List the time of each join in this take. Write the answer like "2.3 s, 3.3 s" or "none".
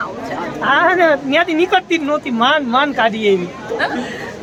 none